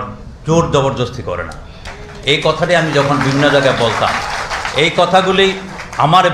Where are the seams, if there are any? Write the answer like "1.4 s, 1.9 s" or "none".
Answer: 1.5 s